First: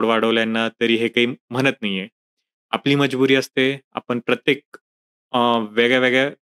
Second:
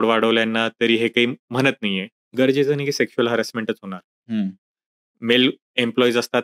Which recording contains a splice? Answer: second; 1 cut; at 2.2 s

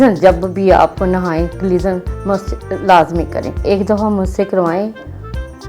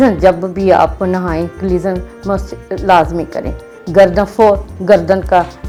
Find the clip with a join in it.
first; 1 cut; at 3.6 s

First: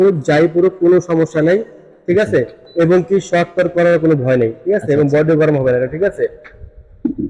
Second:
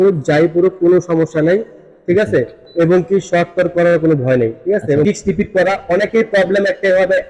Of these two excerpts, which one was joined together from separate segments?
second; 1 cut; at 5.0 s

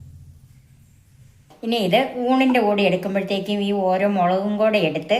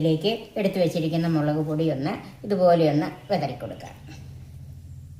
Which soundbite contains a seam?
first; 1 cut; at 1.5 s

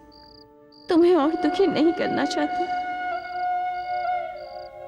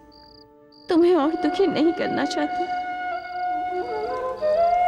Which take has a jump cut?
second; 1 cut; at 3.8 s

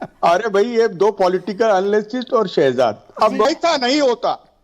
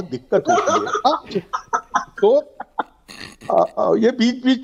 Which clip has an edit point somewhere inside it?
first; 1 cut; at 3.5 s

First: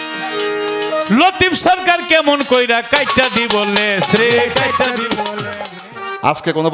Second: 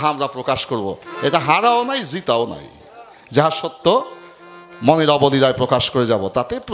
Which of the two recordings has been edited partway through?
first; 1 cut; at 5.7 s

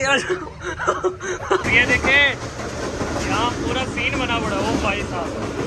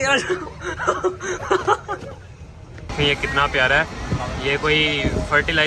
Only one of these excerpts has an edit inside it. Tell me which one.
first; 1 cut; at 1.7 s

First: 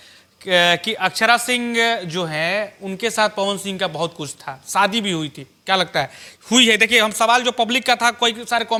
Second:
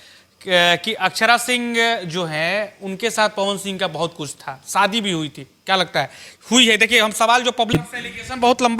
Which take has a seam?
second; 1 cut; at 7.8 s

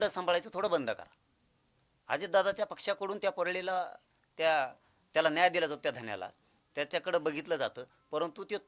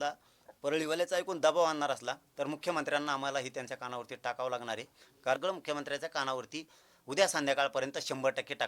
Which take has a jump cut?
second; 1 cut; at 5.4 s

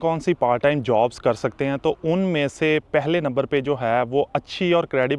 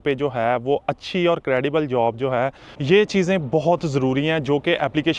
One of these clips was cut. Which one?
second; 1 cut; at 2.7 s

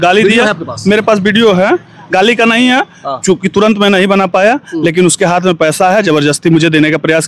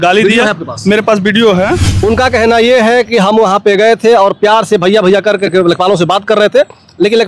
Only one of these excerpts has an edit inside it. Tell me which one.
second; 1 cut; at 1.8 s

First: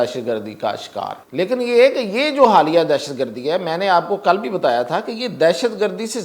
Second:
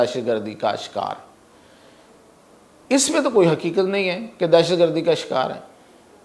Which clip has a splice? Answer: first; 1 cut; at 1.2 s

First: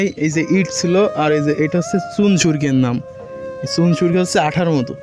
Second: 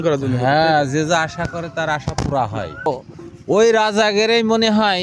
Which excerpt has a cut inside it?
second; 1 cut; at 2.9 s

